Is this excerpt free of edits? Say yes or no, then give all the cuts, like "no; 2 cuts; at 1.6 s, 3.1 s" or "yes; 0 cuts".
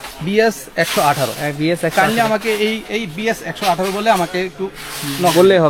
yes; 0 cuts